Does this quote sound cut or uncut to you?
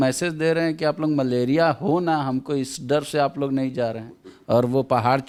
uncut